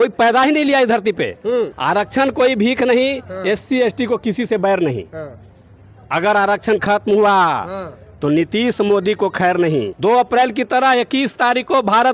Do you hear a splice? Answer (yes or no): yes